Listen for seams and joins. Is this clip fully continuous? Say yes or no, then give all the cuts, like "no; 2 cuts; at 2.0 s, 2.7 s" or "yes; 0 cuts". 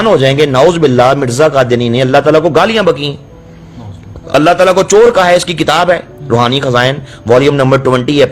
yes; 0 cuts